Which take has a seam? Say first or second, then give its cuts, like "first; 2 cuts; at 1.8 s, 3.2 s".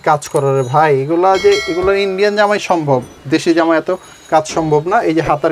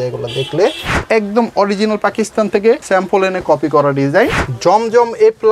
second; 3 cuts; at 1.0 s, 2.8 s, 4.4 s